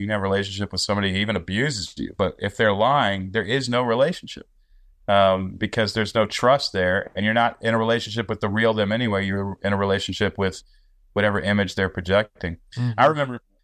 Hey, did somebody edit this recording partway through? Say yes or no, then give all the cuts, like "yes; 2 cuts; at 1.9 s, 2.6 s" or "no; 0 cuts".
no; 0 cuts